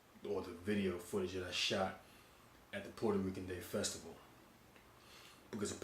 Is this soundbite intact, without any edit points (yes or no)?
no